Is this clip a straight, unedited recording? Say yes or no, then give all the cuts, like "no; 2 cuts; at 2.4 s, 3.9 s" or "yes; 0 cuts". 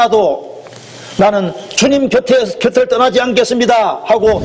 yes; 0 cuts